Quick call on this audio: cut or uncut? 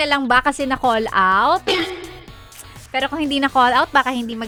uncut